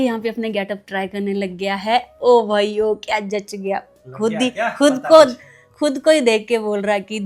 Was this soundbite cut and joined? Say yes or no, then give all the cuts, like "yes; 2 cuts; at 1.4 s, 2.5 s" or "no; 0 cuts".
no; 0 cuts